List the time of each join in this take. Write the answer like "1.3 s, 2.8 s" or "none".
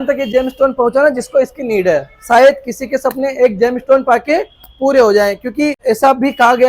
5.8 s

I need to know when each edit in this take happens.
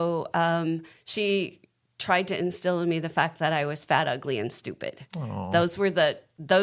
none

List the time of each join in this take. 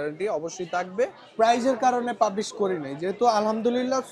1.2 s

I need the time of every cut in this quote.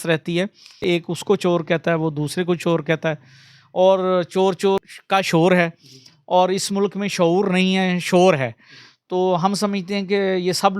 0.8 s, 4.9 s

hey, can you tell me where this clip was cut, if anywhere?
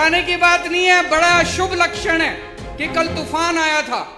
none

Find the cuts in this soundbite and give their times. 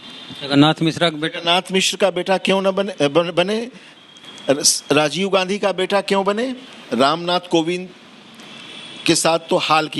6.7 s

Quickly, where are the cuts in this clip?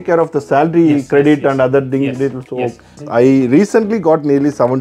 3.0 s

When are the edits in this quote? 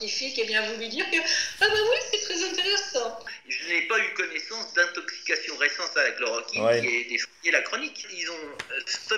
3.2 s, 8.1 s

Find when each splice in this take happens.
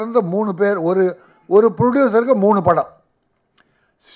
none

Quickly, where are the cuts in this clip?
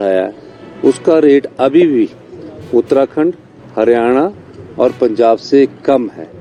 none

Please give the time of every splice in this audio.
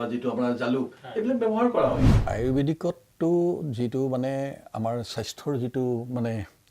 2.1 s

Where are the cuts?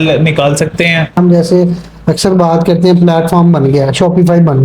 1.2 s

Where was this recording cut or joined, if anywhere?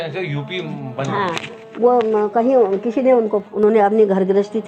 3.4 s

